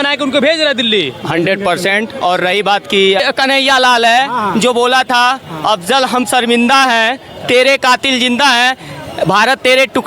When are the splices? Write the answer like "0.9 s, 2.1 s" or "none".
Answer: 3.2 s